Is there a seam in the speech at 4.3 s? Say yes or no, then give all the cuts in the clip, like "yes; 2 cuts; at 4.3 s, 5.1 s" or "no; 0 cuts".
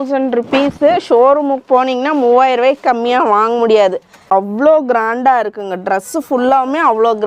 yes; 1 cut; at 4.3 s